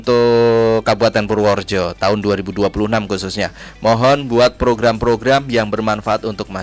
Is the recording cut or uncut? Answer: uncut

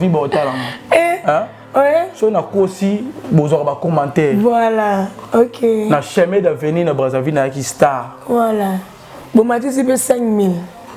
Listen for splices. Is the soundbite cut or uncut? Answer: uncut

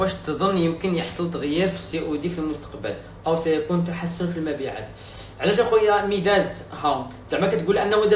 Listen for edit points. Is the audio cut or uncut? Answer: uncut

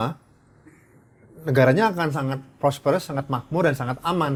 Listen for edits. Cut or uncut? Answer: uncut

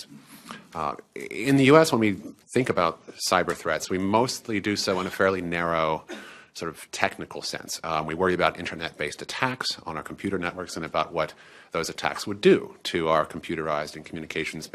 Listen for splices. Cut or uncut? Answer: uncut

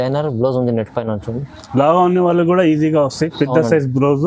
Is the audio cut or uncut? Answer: uncut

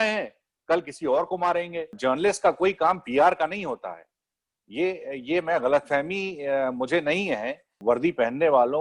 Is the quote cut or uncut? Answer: cut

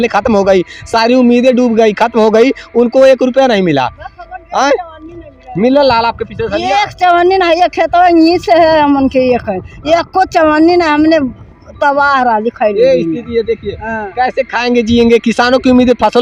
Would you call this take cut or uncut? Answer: uncut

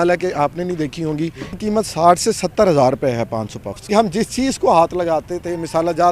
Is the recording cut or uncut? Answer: cut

